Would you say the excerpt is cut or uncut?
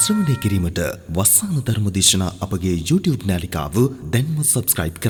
uncut